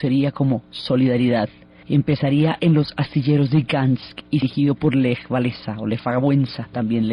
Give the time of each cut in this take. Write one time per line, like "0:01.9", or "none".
0:02.5